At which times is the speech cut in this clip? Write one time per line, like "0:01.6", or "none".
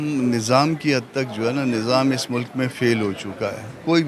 none